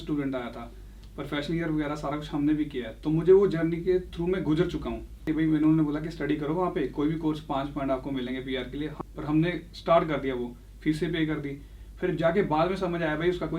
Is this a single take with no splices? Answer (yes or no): no